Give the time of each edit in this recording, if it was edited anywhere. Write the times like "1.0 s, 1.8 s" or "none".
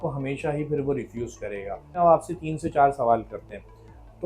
1.9 s